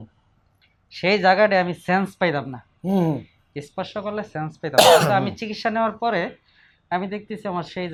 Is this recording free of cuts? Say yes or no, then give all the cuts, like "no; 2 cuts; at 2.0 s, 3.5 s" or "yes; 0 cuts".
yes; 0 cuts